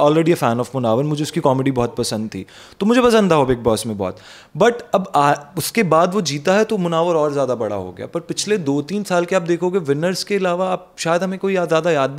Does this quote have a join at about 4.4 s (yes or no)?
no